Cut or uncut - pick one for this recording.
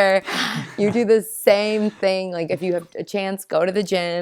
cut